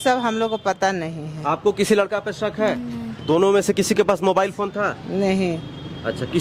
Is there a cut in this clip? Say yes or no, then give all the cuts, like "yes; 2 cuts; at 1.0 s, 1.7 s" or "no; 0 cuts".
yes; 1 cut; at 3.1 s